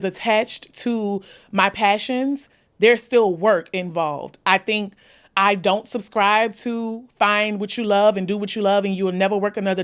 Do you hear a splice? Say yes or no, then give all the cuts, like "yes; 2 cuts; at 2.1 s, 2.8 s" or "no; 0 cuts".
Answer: no; 0 cuts